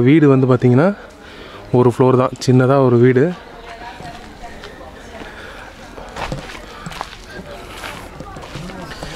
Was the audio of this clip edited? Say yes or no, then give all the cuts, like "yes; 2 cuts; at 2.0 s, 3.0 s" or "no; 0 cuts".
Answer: no; 0 cuts